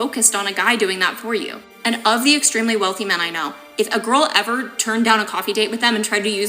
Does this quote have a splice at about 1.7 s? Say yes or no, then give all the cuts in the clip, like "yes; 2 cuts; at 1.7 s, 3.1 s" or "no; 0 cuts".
yes; 1 cut; at 1.7 s